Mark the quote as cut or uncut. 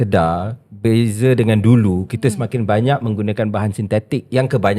uncut